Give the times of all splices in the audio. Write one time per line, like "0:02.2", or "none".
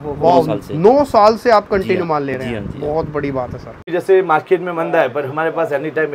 0:03.9